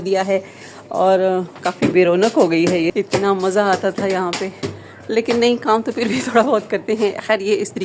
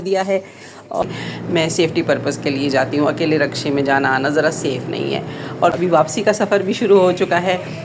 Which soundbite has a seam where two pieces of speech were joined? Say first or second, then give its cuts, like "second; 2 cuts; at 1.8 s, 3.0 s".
second; 2 cuts; at 1.0 s, 5.7 s